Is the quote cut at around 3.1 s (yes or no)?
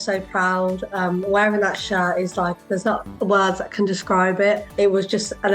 yes